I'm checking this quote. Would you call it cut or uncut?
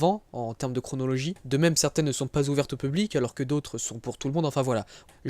cut